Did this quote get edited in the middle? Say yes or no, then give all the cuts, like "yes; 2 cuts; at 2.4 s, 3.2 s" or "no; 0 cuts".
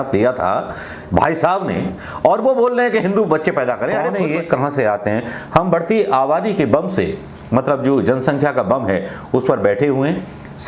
yes; 1 cut; at 4.1 s